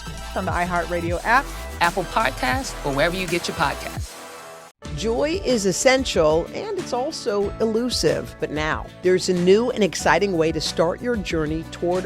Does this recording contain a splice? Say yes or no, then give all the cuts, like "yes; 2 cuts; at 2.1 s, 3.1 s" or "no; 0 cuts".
yes; 1 cut; at 3.7 s